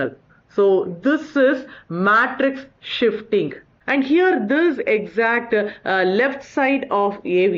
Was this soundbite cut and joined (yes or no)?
yes